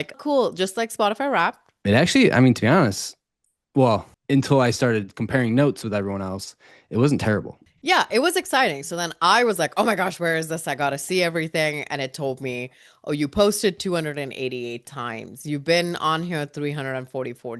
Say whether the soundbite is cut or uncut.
cut